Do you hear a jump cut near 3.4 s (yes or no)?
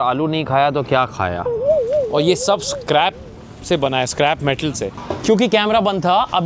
no